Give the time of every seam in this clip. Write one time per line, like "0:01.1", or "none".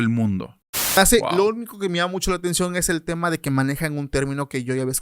0:01.0